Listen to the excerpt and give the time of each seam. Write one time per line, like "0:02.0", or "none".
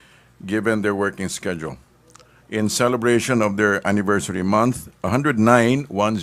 0:02.0